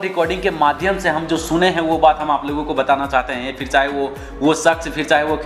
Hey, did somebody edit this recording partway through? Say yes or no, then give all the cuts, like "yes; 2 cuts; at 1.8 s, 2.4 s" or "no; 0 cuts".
no; 0 cuts